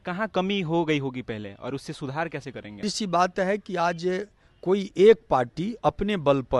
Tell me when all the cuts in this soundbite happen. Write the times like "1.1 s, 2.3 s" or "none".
2.9 s

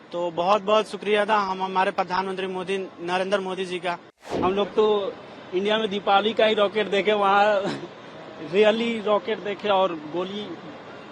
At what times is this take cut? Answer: 4.3 s

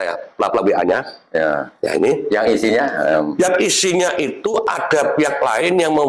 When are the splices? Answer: none

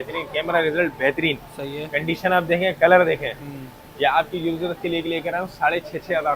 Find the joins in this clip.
none

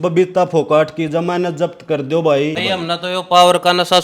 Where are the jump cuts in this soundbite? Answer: 2.6 s

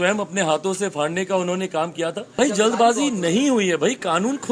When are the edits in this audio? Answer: 2.3 s

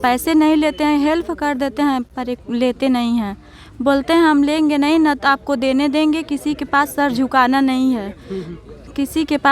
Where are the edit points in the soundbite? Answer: none

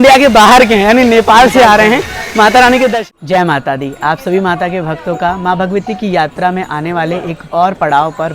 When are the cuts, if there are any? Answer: 3.1 s

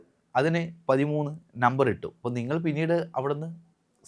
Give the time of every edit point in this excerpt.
2.1 s

